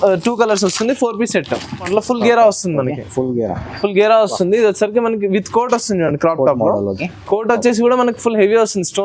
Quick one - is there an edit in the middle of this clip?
yes; 1 cut; at 1.8 s

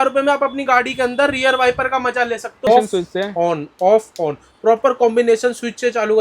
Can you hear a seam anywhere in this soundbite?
yes; 1 cut; at 2.7 s

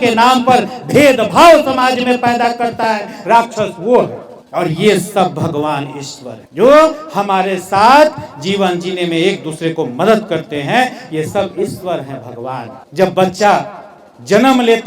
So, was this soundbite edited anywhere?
no; 0 cuts

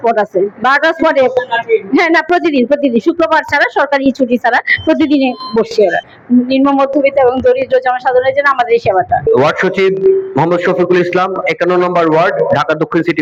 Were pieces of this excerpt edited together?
no; 0 cuts

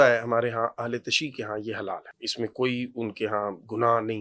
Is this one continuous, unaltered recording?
no; 1 cut; at 2.1 s

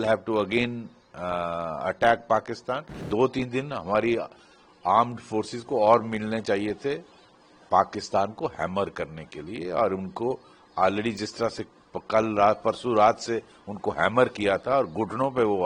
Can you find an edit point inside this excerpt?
yes; 1 cut; at 2.9 s

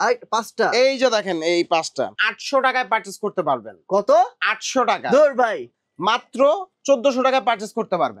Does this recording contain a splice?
yes; 2 cuts; at 2.2 s, 5.6 s

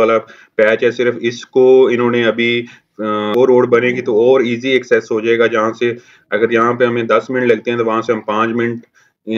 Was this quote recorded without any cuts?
no; 1 cut; at 3.3 s

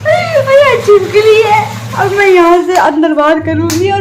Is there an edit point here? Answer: no; 0 cuts

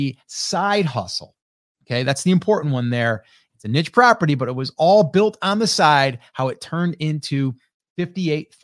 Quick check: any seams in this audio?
no; 0 cuts

